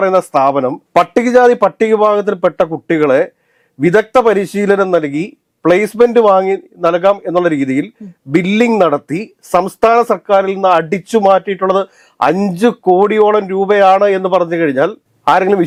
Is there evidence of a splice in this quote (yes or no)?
no